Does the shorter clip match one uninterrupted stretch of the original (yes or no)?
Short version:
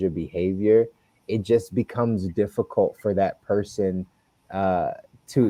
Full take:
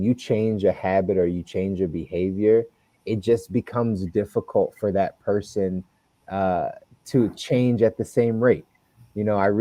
yes